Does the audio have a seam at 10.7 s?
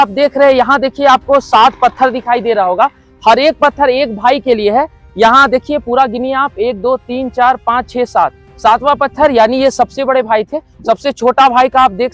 yes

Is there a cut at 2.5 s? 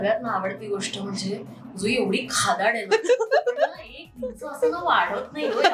no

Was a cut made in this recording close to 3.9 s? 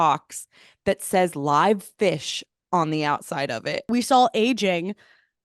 yes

